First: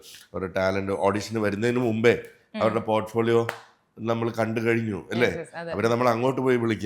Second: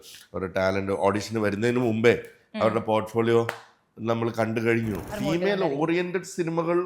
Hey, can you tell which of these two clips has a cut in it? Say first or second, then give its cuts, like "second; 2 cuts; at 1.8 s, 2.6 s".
second; 1 cut; at 5.1 s